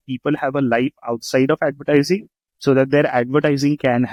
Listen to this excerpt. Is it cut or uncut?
uncut